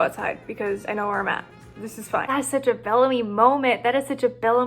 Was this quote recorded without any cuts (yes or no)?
no